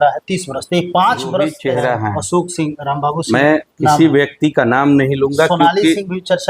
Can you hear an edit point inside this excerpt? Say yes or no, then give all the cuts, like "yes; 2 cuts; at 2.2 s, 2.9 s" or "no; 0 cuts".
yes; 1 cut; at 1.6 s